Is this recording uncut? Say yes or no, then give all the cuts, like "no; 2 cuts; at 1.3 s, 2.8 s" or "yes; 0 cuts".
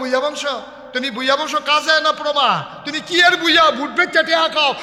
yes; 0 cuts